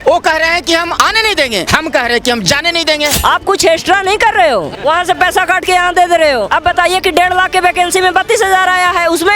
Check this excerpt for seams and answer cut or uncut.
cut